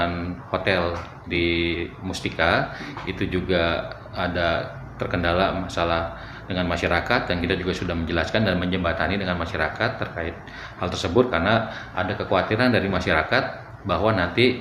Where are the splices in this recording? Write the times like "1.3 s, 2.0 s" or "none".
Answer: none

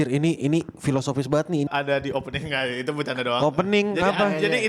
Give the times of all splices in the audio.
1.7 s

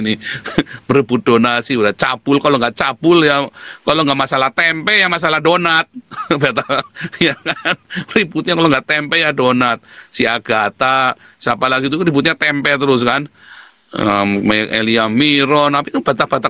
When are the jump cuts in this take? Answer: none

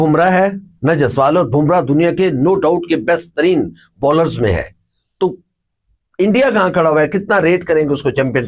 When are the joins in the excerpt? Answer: none

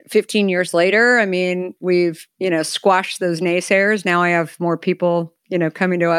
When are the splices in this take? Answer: 2.3 s

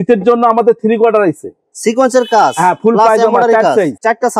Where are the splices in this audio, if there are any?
none

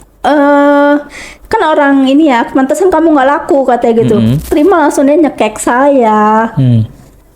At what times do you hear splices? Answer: 4.5 s

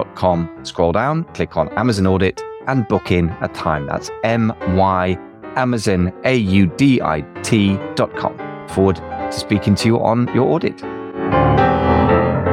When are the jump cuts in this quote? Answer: 8.1 s, 11.2 s

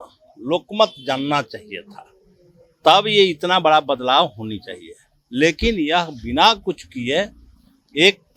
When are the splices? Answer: none

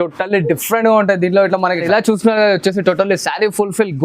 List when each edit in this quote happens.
1.8 s

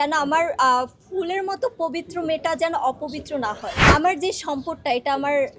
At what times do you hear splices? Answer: 3.7 s

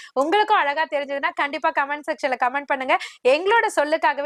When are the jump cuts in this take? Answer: none

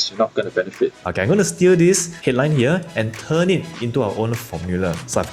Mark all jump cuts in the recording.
1.0 s

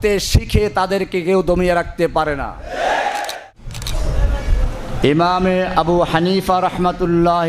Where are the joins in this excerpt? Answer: 3.4 s

